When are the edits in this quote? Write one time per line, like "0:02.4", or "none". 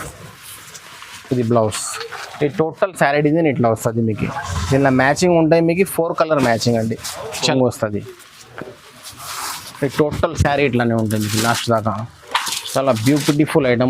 0:07.5